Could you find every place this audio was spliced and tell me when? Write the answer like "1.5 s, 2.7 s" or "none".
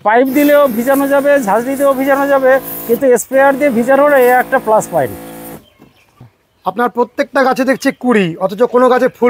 6.2 s